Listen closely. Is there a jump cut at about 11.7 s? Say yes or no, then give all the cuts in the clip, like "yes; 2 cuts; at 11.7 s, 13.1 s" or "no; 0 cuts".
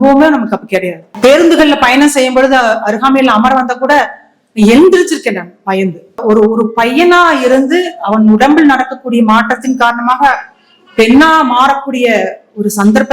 no; 2 cuts; at 1.0 s, 6.2 s